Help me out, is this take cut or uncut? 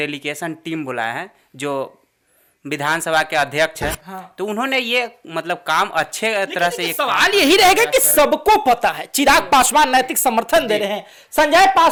uncut